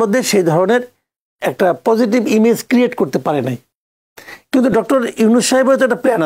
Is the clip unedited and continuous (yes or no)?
yes